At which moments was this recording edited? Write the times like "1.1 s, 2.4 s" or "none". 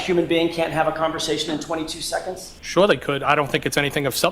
2.5 s